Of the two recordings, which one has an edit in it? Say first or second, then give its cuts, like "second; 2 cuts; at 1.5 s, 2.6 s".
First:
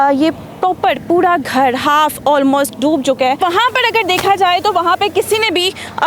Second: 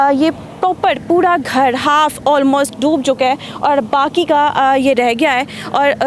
first; 1 cut; at 3.4 s